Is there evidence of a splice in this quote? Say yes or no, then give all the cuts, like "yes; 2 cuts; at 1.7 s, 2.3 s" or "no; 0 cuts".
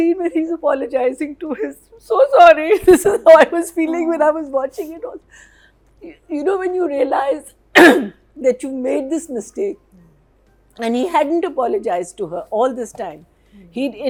no; 0 cuts